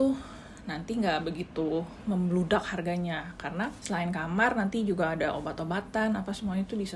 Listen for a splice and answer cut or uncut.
uncut